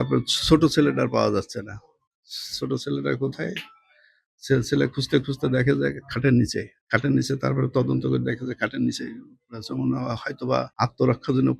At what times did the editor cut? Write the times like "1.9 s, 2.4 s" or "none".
6.7 s, 10.7 s